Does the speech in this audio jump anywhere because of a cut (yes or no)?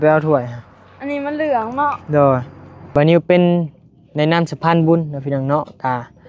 yes